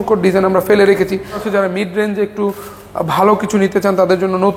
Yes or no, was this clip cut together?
yes